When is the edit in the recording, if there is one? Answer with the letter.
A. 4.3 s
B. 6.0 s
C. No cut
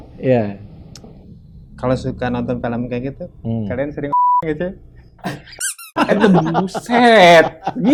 C